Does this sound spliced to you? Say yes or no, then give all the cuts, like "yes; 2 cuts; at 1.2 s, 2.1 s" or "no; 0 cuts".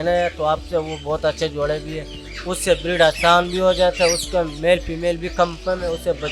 no; 0 cuts